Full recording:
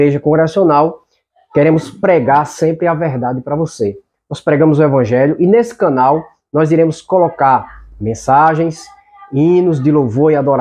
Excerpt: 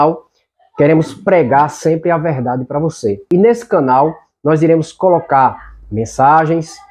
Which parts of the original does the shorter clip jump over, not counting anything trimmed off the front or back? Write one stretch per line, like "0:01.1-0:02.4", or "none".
0:04.0-0:05.4